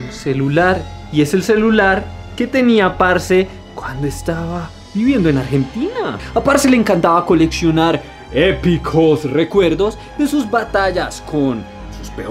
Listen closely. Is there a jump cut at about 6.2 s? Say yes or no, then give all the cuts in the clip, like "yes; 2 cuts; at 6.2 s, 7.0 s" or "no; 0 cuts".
yes; 1 cut; at 6.2 s